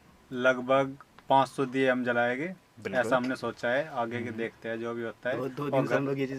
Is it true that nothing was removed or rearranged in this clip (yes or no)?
yes